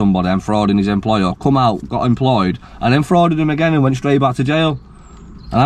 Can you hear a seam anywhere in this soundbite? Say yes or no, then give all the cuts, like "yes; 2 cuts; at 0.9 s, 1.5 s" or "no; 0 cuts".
no; 0 cuts